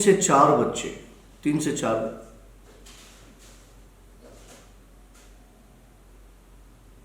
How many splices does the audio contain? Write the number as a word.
zero